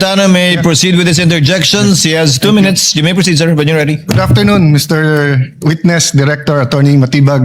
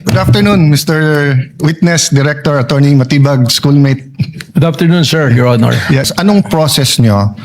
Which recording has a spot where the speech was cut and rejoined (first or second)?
second